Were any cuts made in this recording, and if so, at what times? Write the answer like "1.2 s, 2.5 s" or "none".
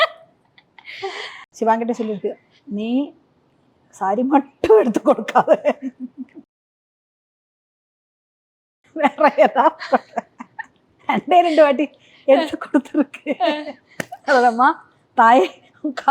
1.4 s